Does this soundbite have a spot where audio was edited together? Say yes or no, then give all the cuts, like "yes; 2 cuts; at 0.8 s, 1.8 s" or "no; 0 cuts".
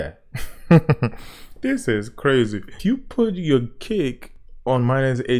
yes; 1 cut; at 2.8 s